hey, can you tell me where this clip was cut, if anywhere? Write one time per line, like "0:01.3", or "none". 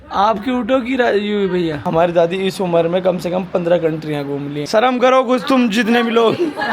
0:01.8
0:04.6